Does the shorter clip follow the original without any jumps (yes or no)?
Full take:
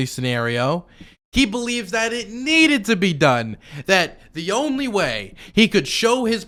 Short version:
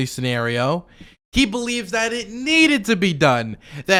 yes